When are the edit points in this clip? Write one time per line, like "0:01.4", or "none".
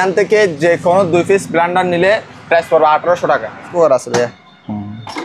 0:03.7